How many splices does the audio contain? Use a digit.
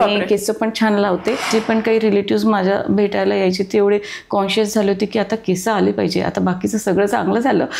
1